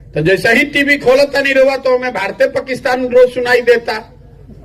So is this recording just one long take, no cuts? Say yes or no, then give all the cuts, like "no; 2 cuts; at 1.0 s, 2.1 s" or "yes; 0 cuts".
yes; 0 cuts